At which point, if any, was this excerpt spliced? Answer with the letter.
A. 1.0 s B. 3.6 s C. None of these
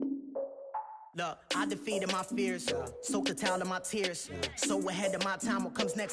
A